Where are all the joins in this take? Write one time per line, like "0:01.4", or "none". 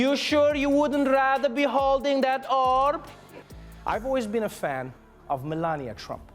0:03.4